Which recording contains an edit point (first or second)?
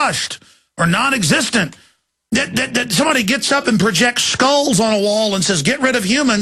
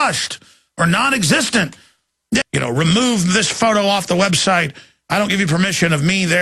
first